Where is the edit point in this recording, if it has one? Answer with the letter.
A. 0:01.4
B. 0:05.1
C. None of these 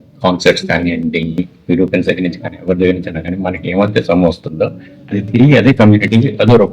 A